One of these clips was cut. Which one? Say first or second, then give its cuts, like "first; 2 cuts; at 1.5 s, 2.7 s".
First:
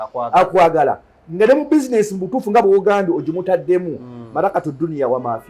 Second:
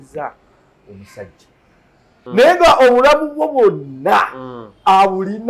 second; 1 cut; at 2.1 s